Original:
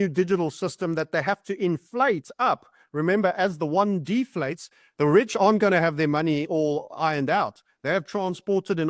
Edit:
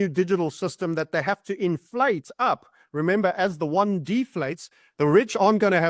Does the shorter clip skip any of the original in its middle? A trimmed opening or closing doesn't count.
no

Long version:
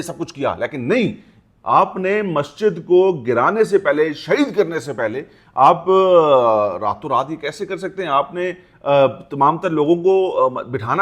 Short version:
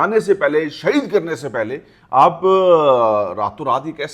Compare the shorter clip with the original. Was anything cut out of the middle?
no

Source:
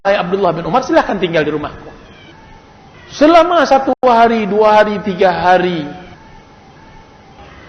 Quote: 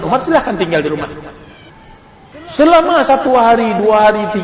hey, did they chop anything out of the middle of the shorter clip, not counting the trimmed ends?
yes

